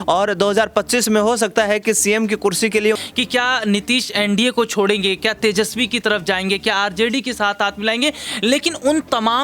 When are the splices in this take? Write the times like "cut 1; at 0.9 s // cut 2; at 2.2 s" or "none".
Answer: cut 1; at 3.0 s